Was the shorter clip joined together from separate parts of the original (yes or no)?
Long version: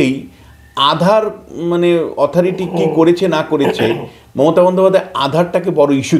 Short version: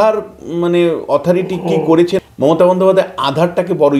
yes